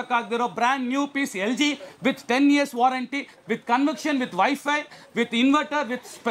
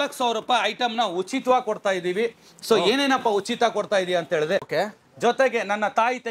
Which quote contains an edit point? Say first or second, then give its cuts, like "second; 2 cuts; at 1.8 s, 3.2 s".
second; 1 cut; at 4.7 s